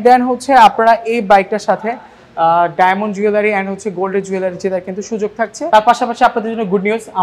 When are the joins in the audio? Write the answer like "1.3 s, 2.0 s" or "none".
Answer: 5.7 s